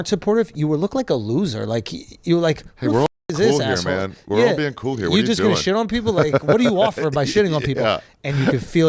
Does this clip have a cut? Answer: no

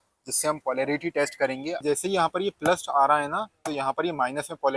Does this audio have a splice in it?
yes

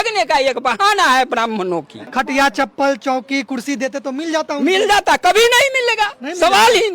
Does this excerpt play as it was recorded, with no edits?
no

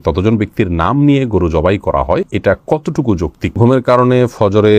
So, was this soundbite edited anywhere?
yes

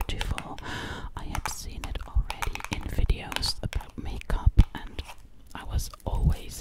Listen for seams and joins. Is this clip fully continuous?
yes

